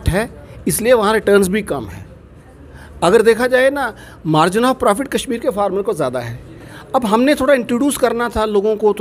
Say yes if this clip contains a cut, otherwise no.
no